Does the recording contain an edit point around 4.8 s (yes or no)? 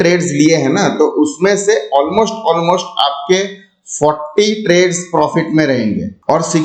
no